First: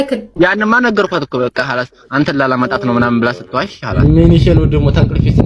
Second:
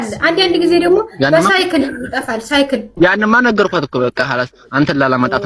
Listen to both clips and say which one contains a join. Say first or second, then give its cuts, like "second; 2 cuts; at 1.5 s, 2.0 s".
first; 1 cut; at 4.0 s